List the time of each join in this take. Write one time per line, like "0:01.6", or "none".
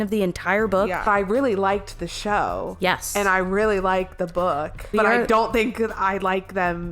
0:01.1
0:04.9

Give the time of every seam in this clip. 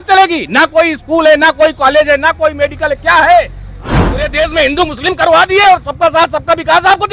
0:04.0

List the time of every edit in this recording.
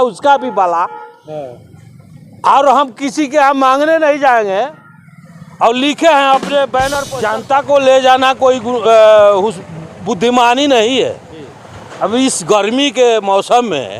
0:07.1

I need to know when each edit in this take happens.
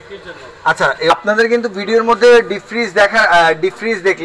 0:01.1

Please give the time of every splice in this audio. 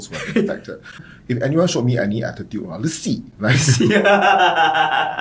0:01.0

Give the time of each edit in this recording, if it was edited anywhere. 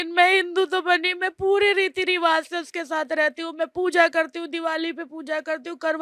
none

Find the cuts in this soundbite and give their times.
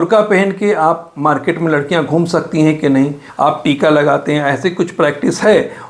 0:03.2

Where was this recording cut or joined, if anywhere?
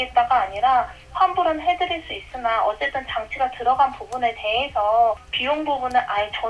0:05.3

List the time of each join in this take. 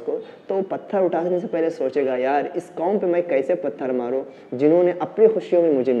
none

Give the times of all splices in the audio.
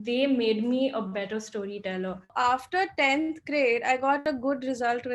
0:02.3
0:04.2

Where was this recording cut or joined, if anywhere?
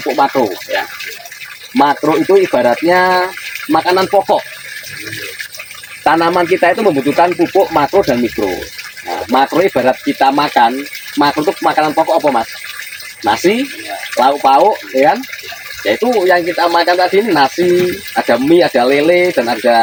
none

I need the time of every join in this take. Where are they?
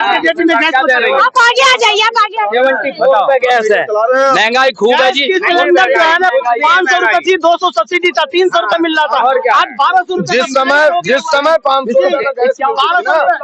none

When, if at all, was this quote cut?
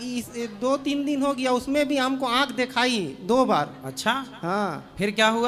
none

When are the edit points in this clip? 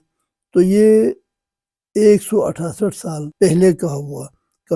0:03.2

